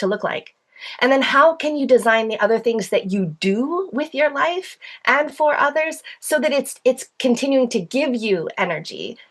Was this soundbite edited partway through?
no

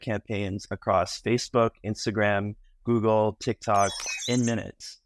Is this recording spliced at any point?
yes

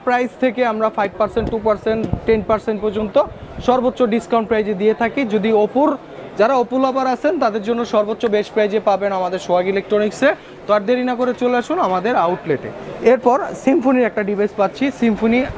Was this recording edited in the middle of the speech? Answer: no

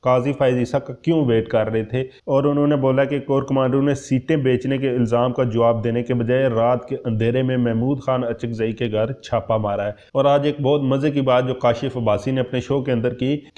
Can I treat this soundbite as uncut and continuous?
no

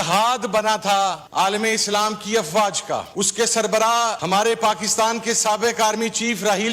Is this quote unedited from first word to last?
no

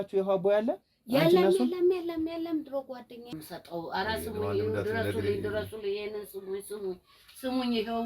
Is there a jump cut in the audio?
yes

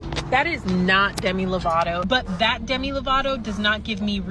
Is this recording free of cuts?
no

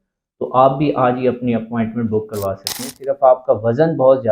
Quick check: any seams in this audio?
yes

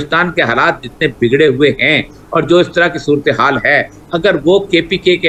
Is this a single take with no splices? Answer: yes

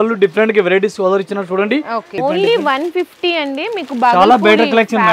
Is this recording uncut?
no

